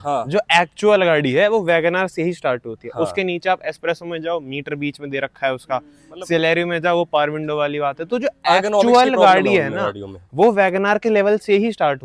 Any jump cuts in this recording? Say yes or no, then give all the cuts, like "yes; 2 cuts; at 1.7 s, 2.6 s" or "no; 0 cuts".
no; 0 cuts